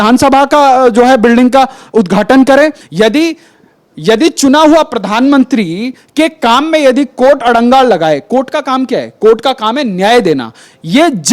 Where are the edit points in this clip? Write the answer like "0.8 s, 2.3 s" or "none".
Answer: 2.8 s